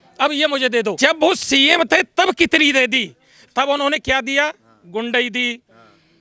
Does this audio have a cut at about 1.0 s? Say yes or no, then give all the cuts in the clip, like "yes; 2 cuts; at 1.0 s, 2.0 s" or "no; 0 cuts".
yes; 1 cut; at 1.0 s